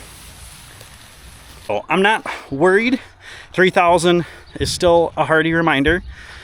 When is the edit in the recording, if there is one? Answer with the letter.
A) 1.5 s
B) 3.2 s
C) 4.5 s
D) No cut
A